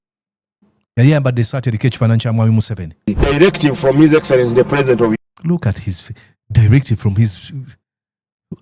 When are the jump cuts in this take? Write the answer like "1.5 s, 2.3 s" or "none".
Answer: 3.1 s